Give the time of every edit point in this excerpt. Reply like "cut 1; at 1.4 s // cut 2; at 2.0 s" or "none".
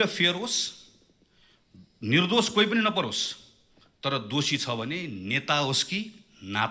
none